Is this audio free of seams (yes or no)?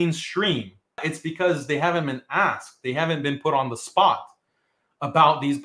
no